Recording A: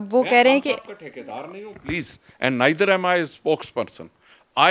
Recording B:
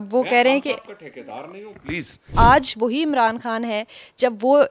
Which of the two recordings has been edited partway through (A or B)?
B